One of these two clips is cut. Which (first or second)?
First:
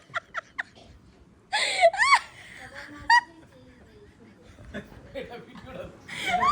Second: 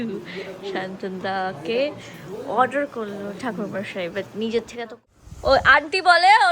second